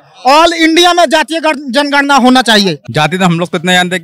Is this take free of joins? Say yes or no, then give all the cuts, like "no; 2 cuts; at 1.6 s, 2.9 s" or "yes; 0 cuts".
no; 1 cut; at 2.8 s